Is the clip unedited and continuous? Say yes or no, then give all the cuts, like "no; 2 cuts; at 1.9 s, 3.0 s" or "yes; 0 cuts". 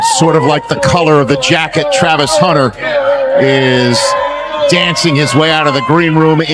yes; 0 cuts